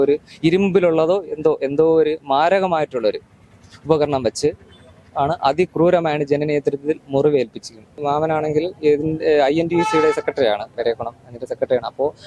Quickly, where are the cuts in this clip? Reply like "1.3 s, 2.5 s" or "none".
8.0 s